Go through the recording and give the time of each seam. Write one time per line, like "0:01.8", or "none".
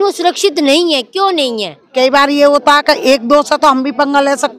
0:01.8